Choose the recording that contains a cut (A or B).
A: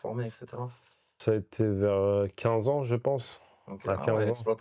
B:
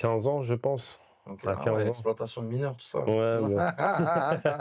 A